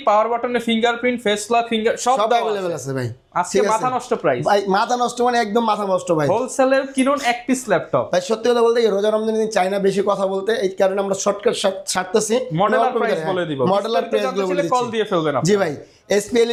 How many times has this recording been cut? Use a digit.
0